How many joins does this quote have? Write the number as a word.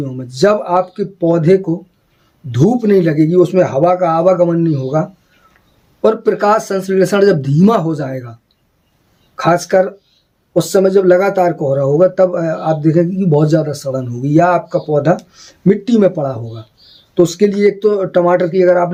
zero